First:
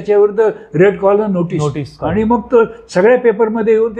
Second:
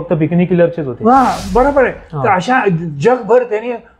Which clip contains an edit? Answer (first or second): second